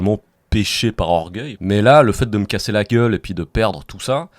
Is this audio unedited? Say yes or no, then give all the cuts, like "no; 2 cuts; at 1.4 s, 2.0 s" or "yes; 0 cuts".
no; 1 cut; at 1.4 s